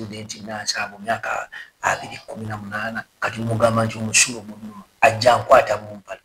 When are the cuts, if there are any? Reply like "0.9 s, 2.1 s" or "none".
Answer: 3.1 s